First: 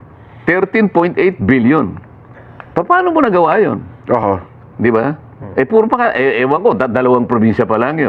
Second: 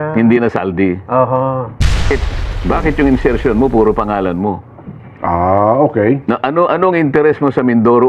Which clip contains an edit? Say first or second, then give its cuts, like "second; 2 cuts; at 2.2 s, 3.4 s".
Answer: second; 1 cut; at 2.1 s